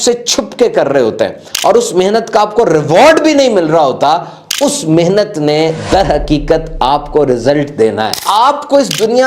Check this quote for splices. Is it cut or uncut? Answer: cut